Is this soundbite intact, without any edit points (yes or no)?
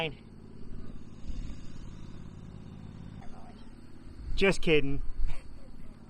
no